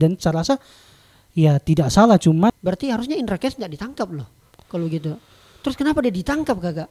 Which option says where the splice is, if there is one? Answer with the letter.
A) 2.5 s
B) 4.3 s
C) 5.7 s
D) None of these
A